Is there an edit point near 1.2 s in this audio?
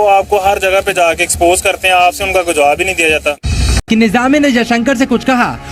no; 1 cut; at 3.7 s

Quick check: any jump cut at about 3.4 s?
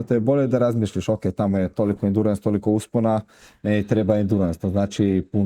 no; 0 cuts

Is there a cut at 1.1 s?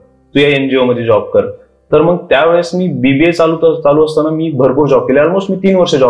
no; 0 cuts

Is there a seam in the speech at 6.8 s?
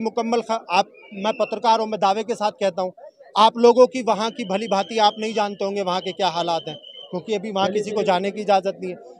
no; 0 cuts

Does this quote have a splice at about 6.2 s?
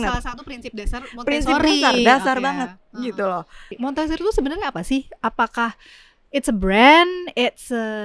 no; 1 cut; at 3.6 s

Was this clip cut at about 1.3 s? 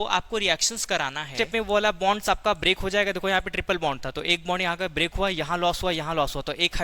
yes; 1 cut; at 1.3 s

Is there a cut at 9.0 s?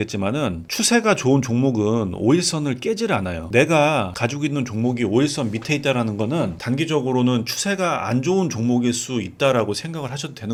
no; 0 cuts

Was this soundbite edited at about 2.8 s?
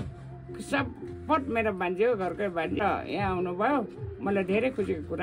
yes; 1 cut; at 2.8 s

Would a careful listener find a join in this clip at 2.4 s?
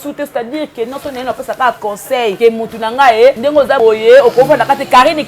yes; 2 cuts; at 2.4 s, 3.6 s

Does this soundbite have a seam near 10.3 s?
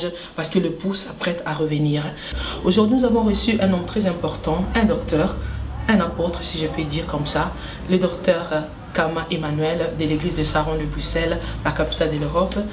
no; 1 cut; at 2.4 s

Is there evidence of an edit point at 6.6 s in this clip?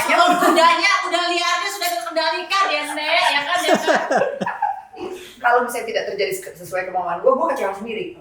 no; 1 cut; at 5.2 s

